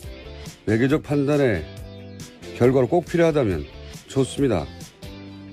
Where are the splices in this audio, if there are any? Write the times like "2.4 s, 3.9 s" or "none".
4.0 s

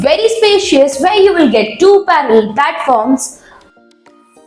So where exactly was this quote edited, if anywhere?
none

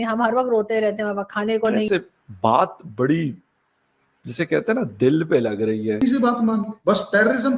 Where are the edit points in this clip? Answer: 1.9 s, 6.0 s

